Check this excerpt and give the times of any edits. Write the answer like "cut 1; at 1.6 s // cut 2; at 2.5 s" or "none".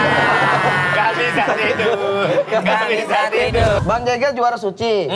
cut 1; at 3.8 s